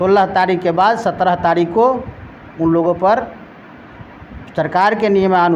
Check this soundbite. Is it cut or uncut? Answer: uncut